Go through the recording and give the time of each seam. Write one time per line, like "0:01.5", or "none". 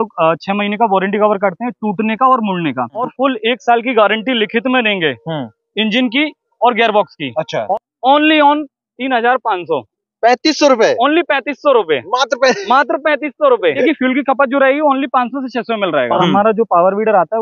0:03.1
0:07.7
0:13.9
0:16.2